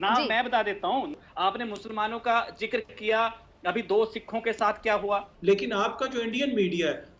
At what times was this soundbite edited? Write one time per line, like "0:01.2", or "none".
0:01.2
0:05.3